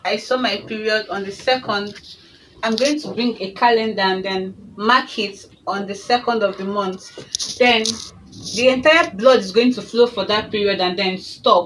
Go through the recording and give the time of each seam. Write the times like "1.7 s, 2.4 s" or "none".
none